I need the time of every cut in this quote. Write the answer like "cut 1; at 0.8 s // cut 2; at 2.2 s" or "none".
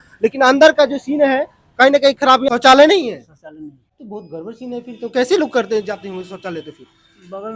cut 1; at 2.5 s // cut 2; at 3.9 s